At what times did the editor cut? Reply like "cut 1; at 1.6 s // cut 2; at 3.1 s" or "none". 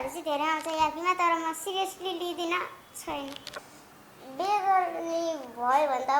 cut 1; at 3.6 s